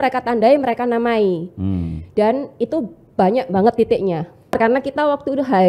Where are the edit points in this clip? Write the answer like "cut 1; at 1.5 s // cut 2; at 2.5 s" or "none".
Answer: cut 1; at 4.6 s